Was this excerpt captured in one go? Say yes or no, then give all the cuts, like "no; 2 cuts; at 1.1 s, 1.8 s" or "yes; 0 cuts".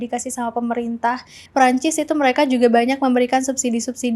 no; 1 cut; at 1.3 s